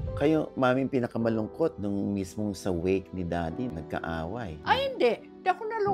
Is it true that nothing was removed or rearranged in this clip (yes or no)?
no